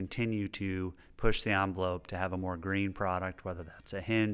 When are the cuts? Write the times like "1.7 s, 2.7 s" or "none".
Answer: none